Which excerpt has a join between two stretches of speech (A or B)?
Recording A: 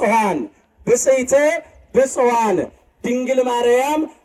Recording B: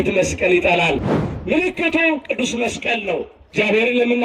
B